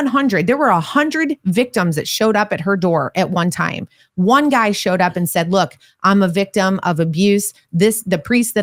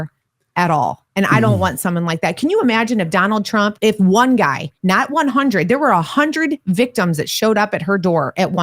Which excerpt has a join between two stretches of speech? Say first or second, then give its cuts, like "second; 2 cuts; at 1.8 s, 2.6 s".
second; 1 cut; at 3.8 s